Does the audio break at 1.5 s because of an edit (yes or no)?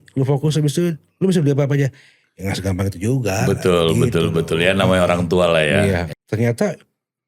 no